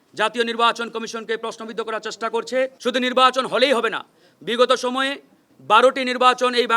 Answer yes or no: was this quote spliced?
yes